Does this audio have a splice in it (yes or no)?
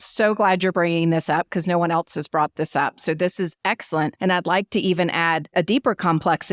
yes